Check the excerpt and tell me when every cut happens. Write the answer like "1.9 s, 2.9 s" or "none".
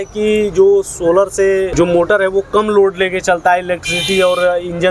1.7 s